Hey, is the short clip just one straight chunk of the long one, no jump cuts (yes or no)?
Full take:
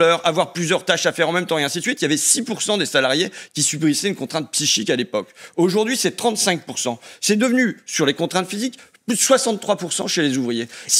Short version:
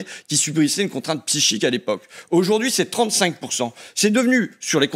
yes